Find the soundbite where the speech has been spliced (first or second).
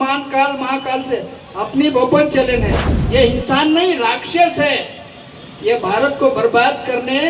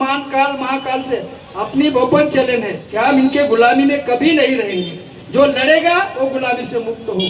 first